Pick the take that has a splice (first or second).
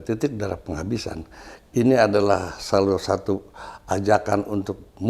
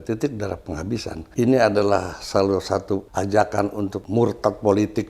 second